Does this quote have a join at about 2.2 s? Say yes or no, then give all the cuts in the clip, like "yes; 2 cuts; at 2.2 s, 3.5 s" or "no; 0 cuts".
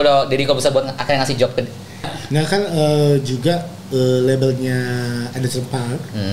yes; 1 cut; at 2.2 s